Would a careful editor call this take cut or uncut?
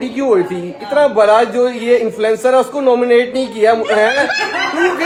uncut